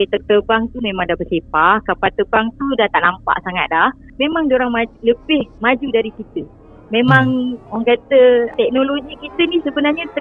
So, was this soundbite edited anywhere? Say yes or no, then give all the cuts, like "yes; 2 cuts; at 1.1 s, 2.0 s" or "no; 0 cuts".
yes; 2 cuts; at 4.1 s, 5.5 s